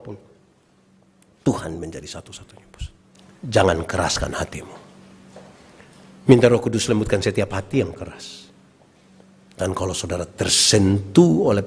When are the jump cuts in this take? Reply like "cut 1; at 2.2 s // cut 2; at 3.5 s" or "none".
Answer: cut 1; at 3.2 s